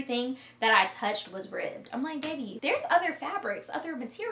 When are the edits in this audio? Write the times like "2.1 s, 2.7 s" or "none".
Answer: 2.5 s